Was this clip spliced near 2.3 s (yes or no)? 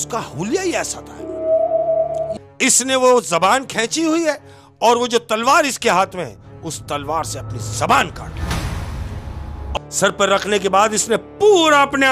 yes